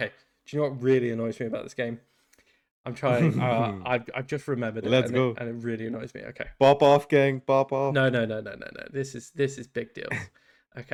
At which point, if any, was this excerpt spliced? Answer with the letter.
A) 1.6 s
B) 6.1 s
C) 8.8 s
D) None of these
D